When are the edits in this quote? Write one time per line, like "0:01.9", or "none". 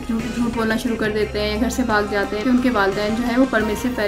0:02.4